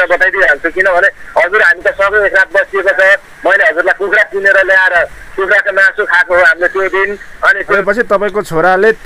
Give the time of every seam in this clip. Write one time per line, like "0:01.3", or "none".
0:07.7